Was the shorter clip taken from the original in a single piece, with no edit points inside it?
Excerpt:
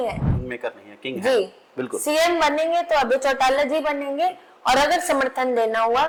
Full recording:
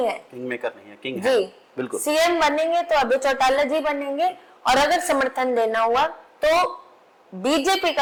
yes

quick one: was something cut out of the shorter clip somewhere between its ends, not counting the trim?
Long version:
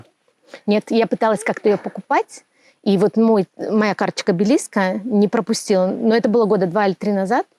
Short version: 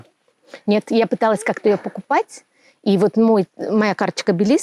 no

